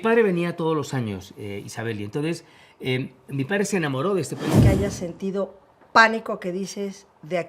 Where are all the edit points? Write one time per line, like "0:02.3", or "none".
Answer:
0:04.6

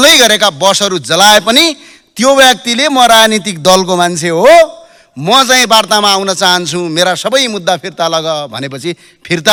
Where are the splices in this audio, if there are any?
none

